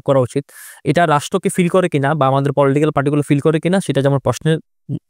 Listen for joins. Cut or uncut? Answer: uncut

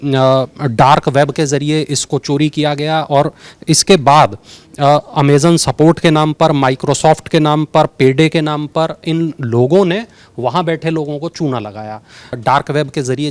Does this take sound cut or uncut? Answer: cut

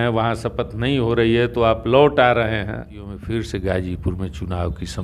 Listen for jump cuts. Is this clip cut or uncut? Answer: cut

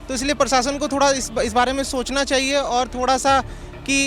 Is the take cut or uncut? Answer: uncut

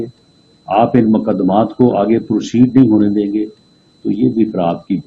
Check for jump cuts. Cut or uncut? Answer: uncut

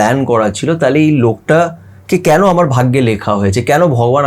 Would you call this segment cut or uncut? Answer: uncut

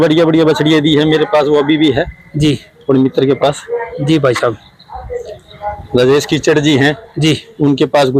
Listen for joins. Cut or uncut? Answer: uncut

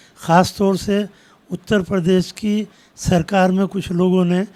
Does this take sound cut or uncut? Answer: uncut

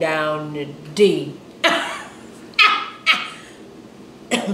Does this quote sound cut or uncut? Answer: uncut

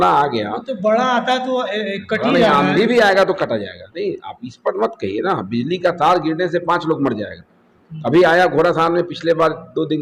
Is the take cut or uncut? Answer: uncut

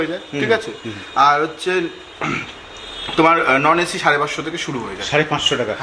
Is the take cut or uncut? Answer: uncut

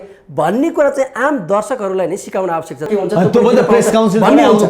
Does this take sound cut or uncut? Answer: cut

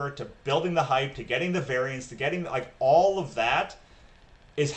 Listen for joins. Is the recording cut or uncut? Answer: uncut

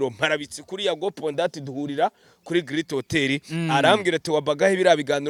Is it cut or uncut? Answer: uncut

